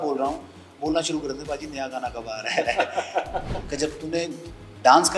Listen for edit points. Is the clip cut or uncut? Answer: cut